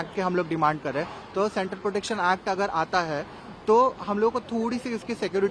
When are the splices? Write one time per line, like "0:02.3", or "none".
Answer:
none